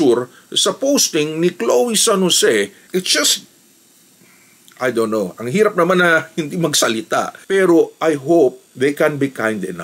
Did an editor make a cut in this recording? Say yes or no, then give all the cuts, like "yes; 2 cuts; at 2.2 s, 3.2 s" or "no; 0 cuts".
yes; 2 cuts; at 2.9 s, 7.4 s